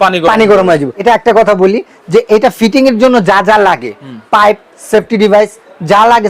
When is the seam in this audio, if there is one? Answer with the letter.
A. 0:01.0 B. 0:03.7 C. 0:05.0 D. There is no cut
A